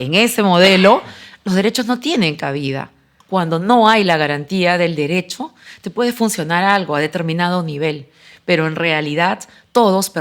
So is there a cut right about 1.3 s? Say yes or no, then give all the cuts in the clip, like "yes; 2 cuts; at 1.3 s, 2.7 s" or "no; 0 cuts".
no; 1 cut; at 3.1 s